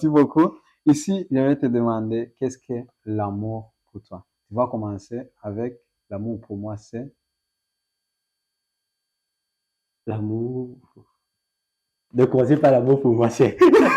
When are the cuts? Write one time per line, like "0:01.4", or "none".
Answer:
none